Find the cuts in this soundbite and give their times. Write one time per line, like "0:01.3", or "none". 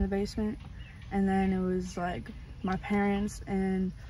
none